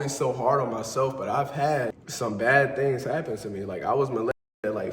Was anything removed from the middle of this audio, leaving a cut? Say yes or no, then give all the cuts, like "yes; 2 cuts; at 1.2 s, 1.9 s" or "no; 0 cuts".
yes; 1 cut; at 1.9 s